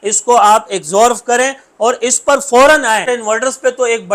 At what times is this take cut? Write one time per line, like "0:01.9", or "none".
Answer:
none